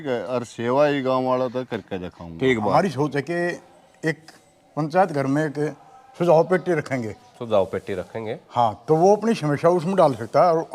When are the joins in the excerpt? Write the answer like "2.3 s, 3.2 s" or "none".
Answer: 2.7 s